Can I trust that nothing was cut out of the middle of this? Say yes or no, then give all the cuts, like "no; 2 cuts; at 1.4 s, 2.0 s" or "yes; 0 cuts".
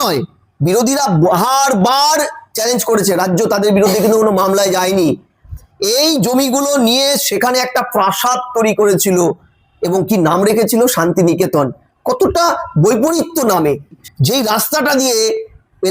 no; 1 cut; at 14.1 s